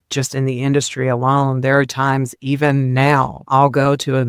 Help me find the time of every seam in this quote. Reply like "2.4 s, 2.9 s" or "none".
3.4 s

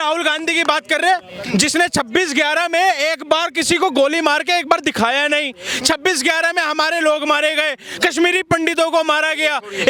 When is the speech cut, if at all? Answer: none

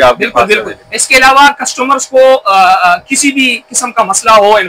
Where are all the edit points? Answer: none

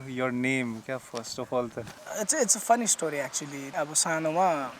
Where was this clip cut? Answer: 2.0 s, 3.7 s

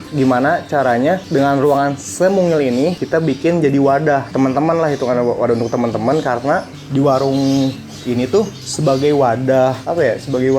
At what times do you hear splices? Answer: 4.3 s

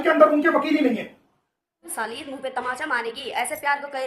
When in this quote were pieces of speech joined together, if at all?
1.8 s

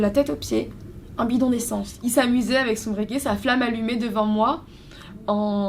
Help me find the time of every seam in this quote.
1.9 s

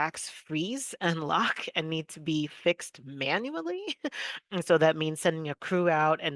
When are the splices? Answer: none

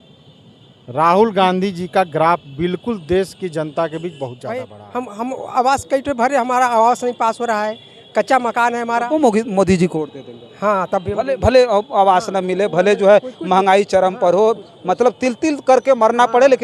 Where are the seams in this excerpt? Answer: 4.7 s

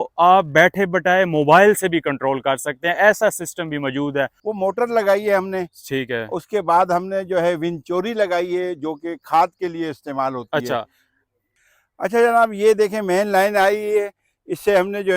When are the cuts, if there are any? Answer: 4.5 s, 11.5 s

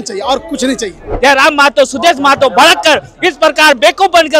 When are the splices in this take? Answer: 1.1 s

